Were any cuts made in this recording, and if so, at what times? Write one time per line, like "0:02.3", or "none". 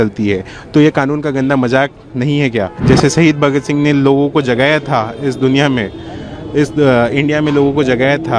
0:02.7

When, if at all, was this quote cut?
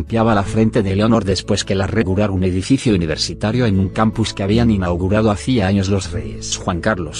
none

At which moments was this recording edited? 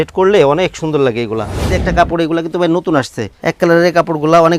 0:01.8
0:03.2

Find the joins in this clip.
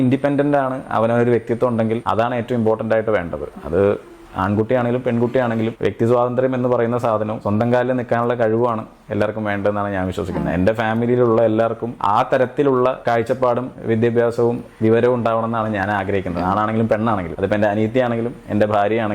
none

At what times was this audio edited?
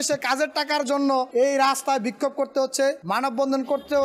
0:01.3
0:03.0

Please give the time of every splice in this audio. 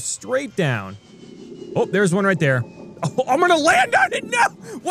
none

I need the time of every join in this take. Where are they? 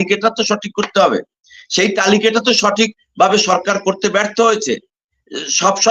none

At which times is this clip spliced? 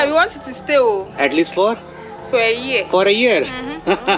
0:01.1

